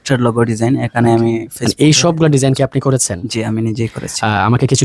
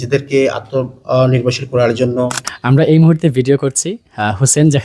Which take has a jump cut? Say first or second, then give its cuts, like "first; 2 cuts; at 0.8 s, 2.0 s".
second; 1 cut; at 2.6 s